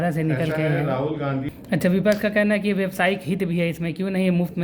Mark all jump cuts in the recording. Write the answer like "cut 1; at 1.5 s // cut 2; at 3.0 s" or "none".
cut 1; at 1.5 s